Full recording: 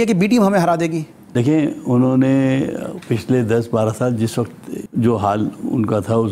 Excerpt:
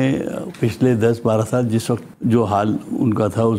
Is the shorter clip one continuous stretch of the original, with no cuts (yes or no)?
no